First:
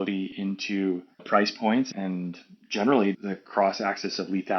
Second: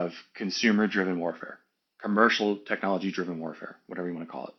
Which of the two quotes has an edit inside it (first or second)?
first